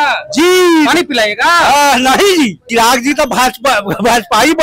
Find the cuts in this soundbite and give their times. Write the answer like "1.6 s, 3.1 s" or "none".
2.6 s